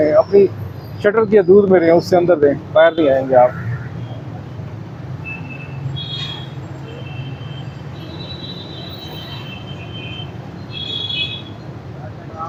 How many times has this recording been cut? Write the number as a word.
zero